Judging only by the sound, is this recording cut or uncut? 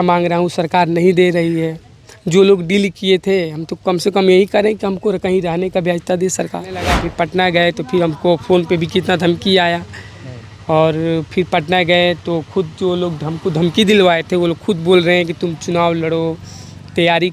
cut